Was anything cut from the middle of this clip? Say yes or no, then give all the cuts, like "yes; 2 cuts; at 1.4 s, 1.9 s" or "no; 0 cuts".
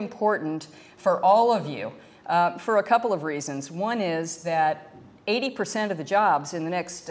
no; 0 cuts